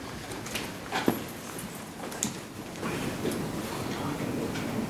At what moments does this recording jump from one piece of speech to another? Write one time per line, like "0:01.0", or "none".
0:02.8

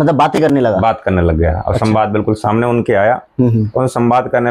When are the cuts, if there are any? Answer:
none

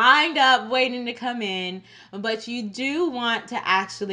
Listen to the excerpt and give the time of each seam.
none

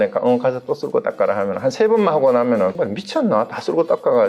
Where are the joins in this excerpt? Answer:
0:02.7

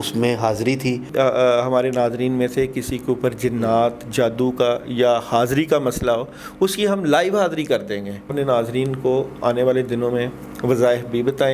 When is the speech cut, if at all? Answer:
0:01.1
0:08.3

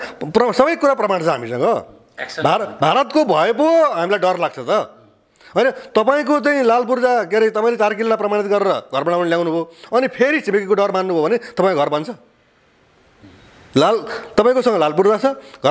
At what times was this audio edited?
none

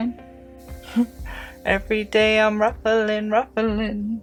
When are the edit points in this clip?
none

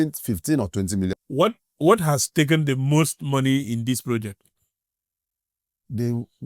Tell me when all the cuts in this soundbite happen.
0:01.1

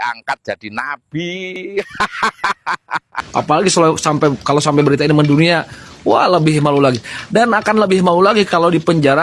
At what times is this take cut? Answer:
0:03.1

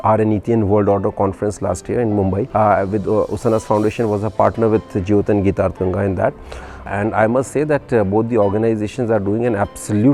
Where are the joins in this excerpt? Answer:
0:02.5
0:06.8

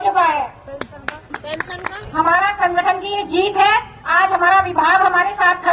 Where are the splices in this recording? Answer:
0:02.0

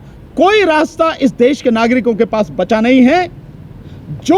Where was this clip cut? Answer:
none

